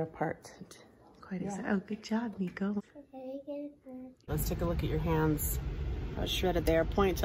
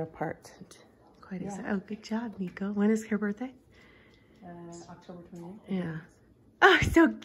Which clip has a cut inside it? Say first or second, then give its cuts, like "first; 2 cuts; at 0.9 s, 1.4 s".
first; 2 cuts; at 2.8 s, 4.3 s